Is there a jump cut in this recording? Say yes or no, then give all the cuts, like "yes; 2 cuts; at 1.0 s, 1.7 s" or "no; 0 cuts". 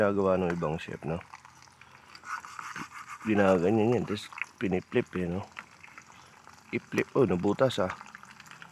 no; 0 cuts